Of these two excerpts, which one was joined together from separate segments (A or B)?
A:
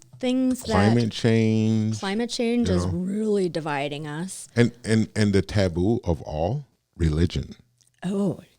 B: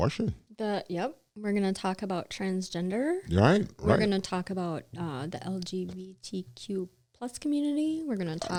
A